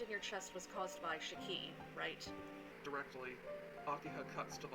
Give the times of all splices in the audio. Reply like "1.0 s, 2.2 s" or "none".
none